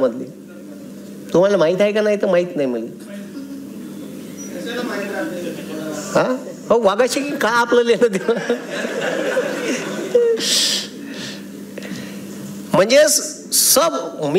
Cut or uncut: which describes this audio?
uncut